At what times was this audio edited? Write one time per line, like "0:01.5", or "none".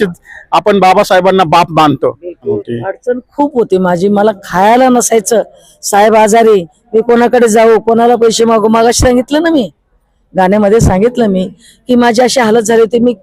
0:02.6